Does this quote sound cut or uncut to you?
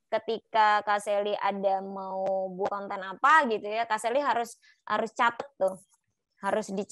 uncut